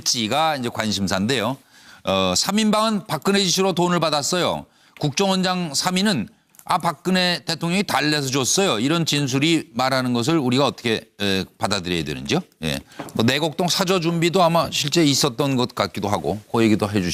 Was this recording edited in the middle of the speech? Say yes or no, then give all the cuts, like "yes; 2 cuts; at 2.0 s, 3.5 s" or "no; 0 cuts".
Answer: no; 0 cuts